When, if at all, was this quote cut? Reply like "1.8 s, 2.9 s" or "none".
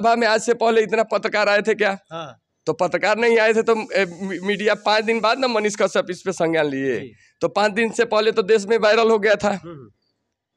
none